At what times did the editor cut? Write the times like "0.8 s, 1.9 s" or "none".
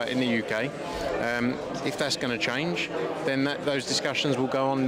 none